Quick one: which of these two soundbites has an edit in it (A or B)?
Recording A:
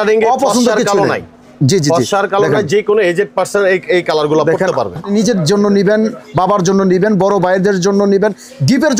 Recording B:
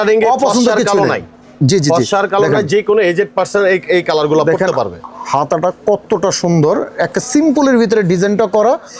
A